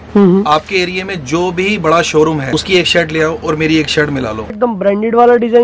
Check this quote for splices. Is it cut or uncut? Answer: cut